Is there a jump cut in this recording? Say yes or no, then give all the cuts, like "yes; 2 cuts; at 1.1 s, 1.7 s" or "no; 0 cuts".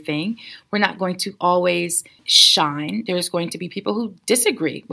yes; 1 cut; at 2.2 s